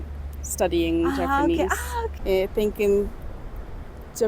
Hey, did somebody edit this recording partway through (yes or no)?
yes